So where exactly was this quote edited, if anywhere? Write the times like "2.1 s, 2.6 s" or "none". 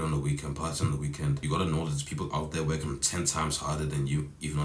1.4 s